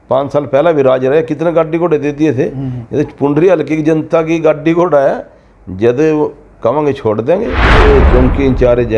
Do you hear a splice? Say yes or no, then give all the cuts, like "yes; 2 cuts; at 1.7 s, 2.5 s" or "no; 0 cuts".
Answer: yes; 1 cut; at 7.7 s